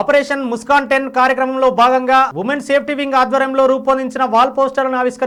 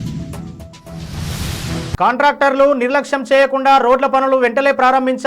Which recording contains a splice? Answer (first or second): second